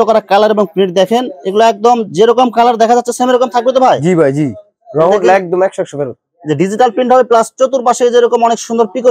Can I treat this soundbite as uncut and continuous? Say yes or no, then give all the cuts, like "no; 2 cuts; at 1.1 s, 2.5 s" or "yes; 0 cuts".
yes; 0 cuts